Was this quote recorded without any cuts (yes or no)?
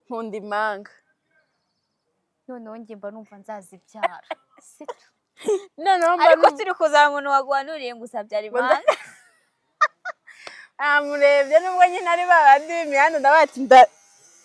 yes